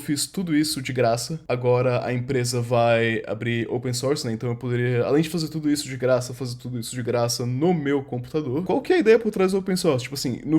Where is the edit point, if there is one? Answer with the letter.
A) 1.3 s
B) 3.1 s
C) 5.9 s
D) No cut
A